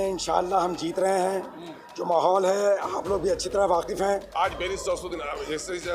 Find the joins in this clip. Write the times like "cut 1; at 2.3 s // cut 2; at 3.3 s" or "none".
cut 1; at 4.3 s